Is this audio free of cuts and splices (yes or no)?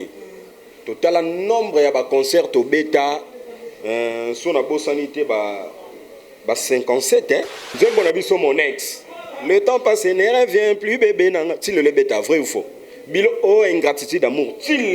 no